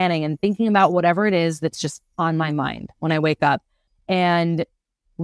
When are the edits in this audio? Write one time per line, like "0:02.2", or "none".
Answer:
0:03.8